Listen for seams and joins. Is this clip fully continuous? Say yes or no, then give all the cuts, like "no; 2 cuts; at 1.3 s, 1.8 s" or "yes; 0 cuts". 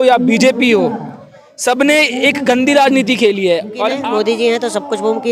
no; 1 cut; at 4.0 s